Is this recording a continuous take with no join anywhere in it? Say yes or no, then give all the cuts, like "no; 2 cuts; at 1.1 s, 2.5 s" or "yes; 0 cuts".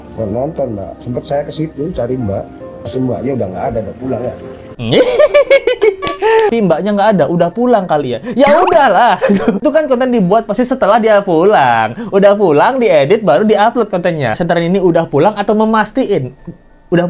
no; 3 cuts; at 2.8 s, 6.5 s, 14.4 s